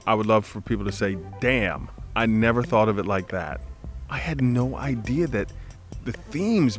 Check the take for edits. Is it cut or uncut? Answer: cut